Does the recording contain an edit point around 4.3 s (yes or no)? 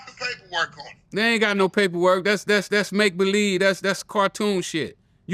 no